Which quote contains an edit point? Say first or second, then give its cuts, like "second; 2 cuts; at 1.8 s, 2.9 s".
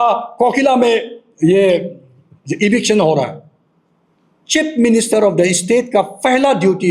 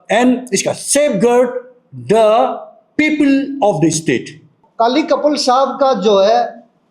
second; 1 cut; at 4.6 s